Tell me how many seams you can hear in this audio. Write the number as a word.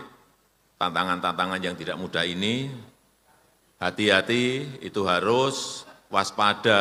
zero